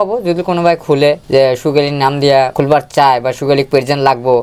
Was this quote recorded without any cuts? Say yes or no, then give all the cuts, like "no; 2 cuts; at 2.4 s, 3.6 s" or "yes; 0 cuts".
no; 2 cuts; at 1.2 s, 2.5 s